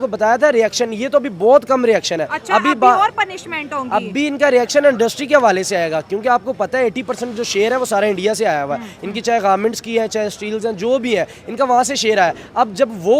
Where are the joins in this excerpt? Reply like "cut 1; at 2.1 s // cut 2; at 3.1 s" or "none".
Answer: none